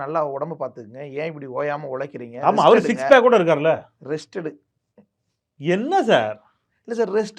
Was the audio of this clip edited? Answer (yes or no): no